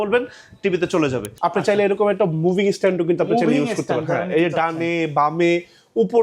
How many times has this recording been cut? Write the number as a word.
one